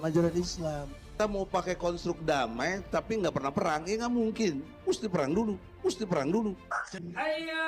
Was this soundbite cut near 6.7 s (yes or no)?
yes